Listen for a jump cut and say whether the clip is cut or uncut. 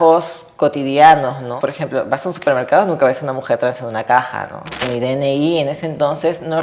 cut